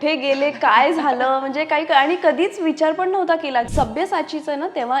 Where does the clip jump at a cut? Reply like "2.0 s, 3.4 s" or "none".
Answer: 3.7 s